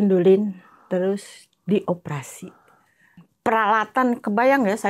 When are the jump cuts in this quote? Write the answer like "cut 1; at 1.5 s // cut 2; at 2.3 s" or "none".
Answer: cut 1; at 3.3 s